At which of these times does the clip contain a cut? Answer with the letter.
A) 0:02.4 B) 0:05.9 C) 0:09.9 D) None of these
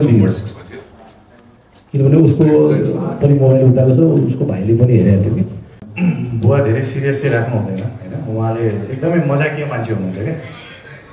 B